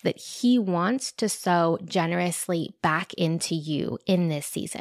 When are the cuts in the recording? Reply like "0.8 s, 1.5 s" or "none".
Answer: none